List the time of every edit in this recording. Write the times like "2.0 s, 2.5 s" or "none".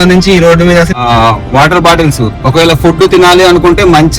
1.0 s